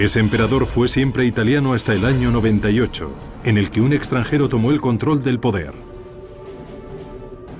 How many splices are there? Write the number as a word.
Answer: one